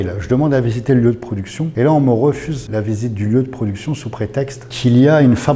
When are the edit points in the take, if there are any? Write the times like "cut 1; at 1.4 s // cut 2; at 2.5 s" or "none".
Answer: cut 1; at 1.6 s // cut 2; at 2.5 s // cut 3; at 4.6 s